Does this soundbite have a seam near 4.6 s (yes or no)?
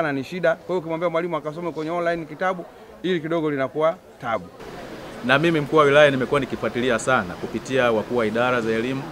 yes